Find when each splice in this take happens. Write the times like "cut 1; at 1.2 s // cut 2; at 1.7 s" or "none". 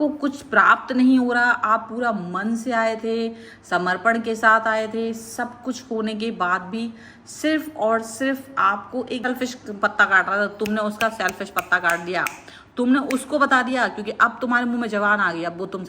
cut 1; at 9.2 s

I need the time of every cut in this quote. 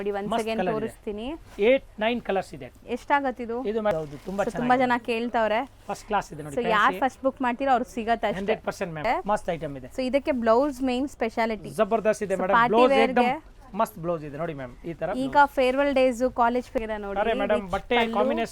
cut 1; at 3.9 s // cut 2; at 9.0 s // cut 3; at 16.8 s

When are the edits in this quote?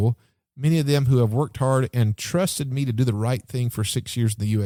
none

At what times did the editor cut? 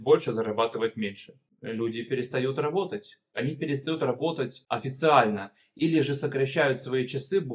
cut 1; at 1.5 s // cut 2; at 3.3 s // cut 3; at 4.6 s

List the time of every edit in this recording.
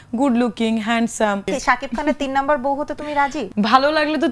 cut 1; at 1.5 s // cut 2; at 3.4 s

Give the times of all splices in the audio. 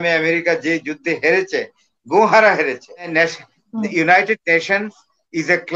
cut 1; at 2.9 s

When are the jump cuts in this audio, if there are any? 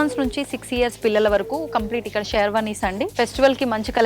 cut 1; at 3.1 s

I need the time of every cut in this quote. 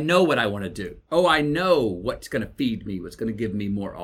none

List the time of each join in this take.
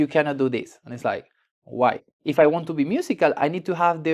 cut 1; at 2.2 s

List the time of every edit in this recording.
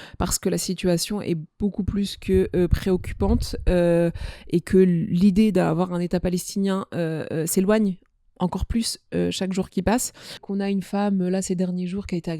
cut 1; at 10.4 s

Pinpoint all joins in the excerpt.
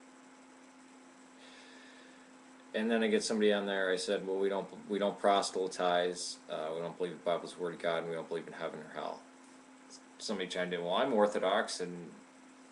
cut 1; at 7.3 s

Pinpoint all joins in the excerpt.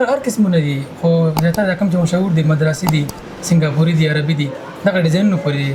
none

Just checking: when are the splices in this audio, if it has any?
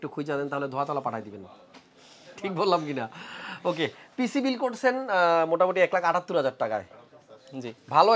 none

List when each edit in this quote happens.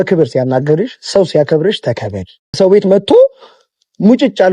cut 1; at 2.6 s

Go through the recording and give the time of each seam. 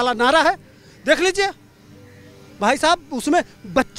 none

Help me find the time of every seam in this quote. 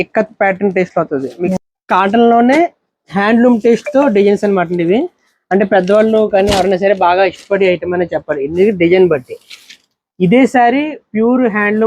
cut 1; at 1.5 s

